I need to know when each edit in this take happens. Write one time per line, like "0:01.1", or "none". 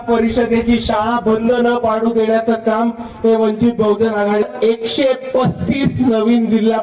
0:04.4